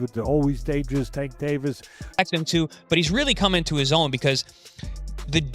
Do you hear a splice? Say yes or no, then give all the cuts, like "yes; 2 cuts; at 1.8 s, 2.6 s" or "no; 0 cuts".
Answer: yes; 1 cut; at 2.2 s